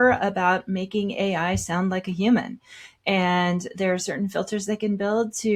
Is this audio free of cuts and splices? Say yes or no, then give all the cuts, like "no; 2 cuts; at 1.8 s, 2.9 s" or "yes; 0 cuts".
yes; 0 cuts